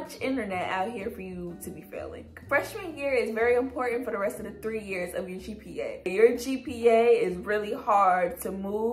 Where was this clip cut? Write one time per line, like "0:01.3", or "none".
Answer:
none